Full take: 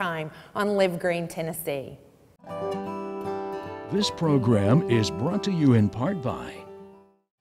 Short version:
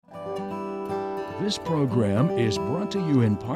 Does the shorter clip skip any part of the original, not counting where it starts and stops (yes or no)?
yes